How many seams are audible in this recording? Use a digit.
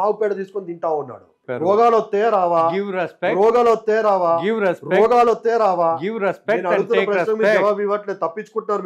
1